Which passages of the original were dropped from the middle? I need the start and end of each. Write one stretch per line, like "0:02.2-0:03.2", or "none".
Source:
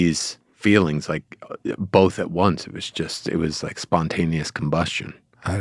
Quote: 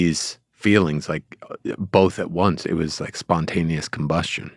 0:02.6-0:03.2

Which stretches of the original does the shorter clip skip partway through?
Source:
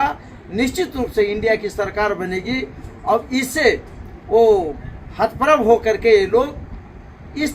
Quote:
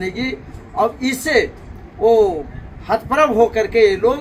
none

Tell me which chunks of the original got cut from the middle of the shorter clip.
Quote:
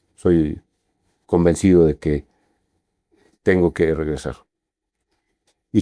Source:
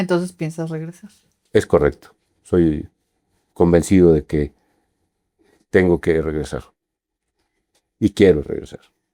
none

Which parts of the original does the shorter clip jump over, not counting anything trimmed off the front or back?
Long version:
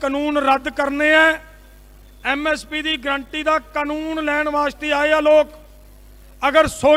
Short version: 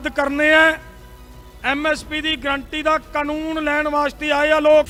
none

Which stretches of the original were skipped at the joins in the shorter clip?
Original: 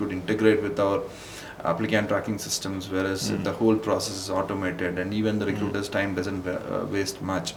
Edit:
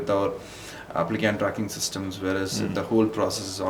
none

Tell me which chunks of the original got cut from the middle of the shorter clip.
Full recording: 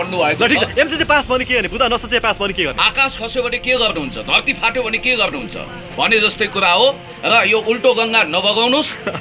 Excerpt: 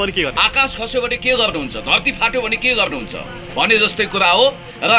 none

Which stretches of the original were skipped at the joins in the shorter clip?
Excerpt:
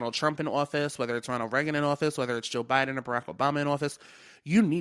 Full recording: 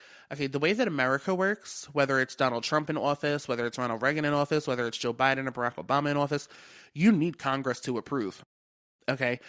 none

